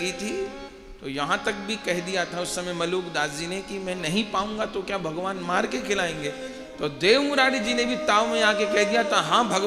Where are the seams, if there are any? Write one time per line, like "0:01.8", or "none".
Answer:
none